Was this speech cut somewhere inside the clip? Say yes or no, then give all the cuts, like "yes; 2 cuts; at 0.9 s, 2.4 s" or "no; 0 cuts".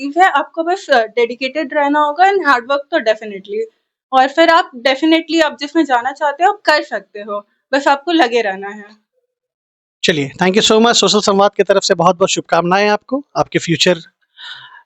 no; 0 cuts